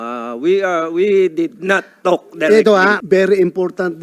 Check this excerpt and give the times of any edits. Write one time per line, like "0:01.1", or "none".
0:03.0